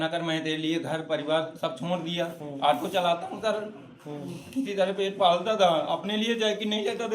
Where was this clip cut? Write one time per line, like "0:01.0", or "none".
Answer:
0:02.4